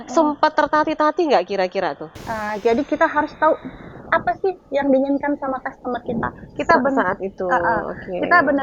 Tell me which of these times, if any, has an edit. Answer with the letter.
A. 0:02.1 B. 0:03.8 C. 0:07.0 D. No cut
A